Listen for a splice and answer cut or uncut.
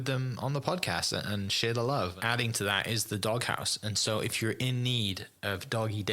cut